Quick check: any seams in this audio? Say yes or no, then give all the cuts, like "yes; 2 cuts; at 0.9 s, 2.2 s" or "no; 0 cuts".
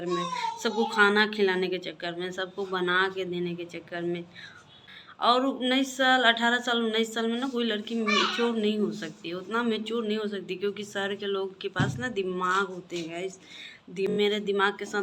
yes; 2 cuts; at 4.8 s, 14.1 s